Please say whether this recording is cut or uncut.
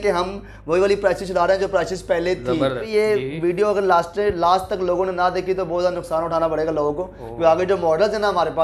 cut